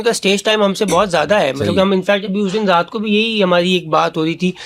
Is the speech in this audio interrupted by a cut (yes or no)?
no